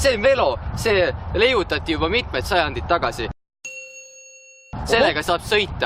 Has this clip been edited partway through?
no; 0 cuts

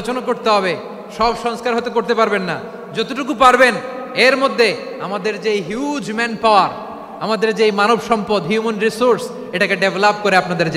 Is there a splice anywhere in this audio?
no; 0 cuts

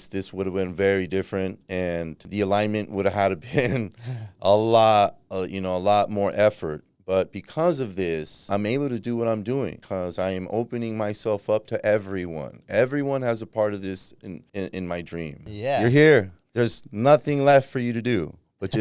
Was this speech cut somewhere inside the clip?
yes; 5 cuts; at 2.2 s, 8.4 s, 9.8 s, 14.3 s, 15.5 s

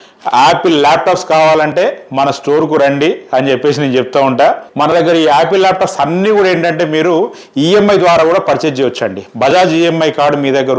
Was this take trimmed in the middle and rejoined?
yes; 1 cut; at 4.7 s

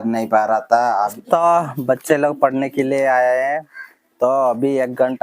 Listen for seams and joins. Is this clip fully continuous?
no; 1 cut; at 1.1 s

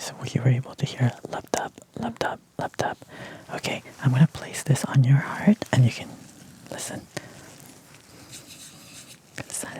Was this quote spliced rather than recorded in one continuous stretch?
no; 0 cuts

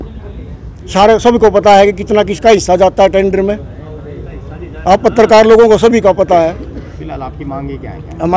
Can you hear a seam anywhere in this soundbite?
no; 0 cuts

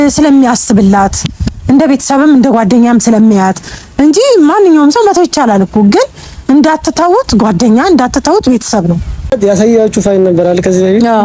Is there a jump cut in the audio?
yes; 1 cut; at 9.4 s

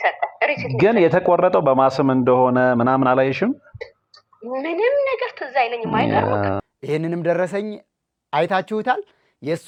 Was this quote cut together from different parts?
no; 0 cuts

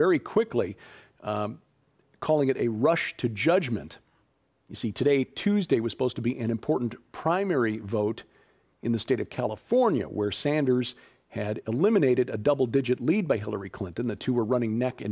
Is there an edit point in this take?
no; 0 cuts

